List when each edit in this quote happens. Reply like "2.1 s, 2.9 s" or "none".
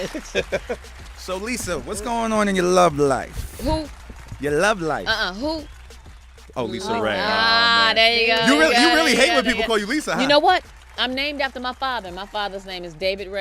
7.5 s